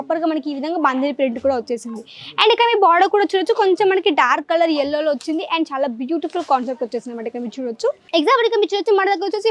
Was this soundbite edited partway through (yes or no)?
yes